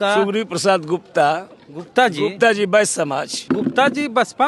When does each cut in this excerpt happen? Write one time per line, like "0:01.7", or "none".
0:03.3